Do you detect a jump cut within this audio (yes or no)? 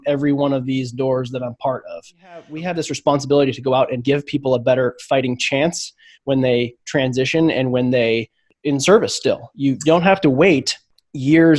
yes